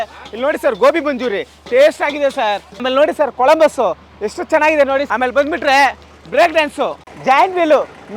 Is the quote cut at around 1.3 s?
no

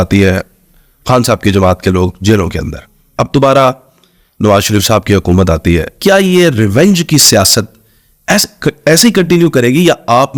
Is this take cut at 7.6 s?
no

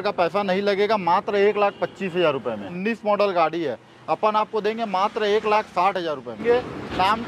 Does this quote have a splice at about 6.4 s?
yes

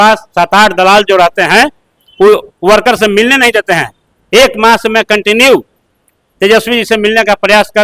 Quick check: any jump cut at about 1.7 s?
no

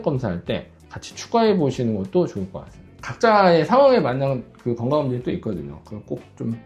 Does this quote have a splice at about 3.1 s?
yes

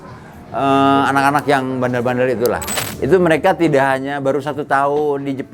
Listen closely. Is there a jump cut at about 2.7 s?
yes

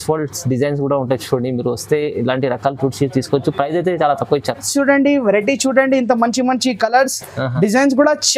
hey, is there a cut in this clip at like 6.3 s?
no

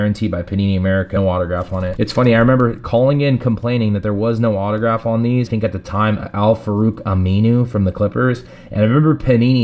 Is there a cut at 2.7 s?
no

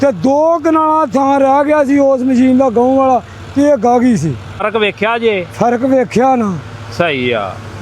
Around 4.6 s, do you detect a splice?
yes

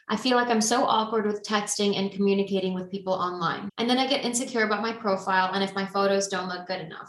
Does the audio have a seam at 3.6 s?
yes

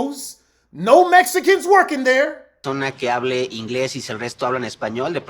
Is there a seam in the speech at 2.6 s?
yes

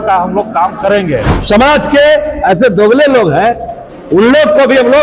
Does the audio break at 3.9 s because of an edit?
no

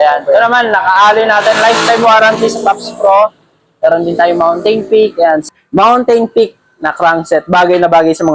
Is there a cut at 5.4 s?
yes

